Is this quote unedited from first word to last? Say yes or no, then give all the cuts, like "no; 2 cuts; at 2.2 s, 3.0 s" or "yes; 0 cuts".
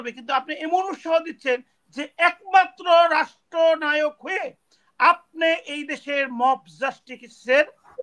yes; 0 cuts